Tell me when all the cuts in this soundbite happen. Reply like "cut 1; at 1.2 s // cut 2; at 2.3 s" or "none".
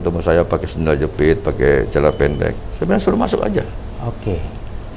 cut 1; at 2.6 s